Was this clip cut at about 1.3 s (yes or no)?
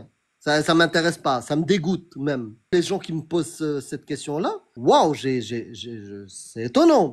no